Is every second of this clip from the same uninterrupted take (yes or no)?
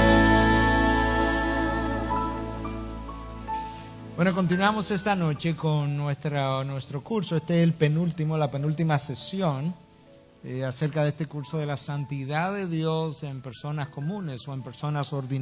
yes